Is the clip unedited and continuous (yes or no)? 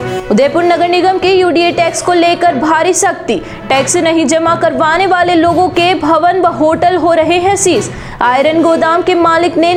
yes